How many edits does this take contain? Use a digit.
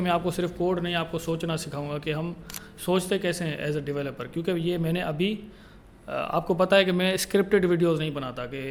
0